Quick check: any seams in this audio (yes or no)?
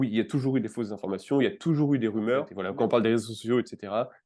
yes